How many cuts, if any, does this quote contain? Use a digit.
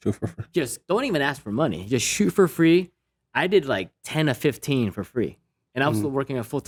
0